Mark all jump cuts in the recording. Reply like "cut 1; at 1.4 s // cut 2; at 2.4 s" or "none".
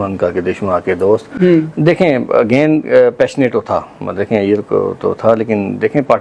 none